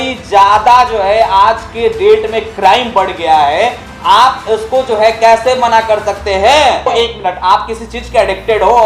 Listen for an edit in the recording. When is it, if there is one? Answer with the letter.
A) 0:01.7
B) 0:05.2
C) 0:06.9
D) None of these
C